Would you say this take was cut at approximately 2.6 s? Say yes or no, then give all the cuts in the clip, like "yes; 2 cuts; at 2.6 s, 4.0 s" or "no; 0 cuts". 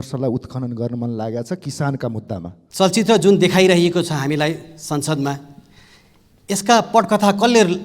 yes; 1 cut; at 2.6 s